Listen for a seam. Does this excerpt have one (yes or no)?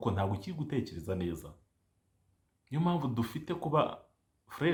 no